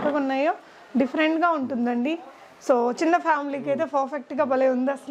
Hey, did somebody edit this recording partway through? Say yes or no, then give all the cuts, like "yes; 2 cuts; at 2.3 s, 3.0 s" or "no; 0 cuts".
no; 0 cuts